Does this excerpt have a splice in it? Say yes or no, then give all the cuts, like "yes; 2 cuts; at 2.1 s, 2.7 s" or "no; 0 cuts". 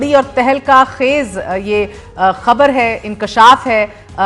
no; 0 cuts